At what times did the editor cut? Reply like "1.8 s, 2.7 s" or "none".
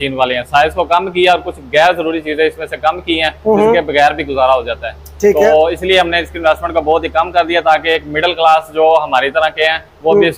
none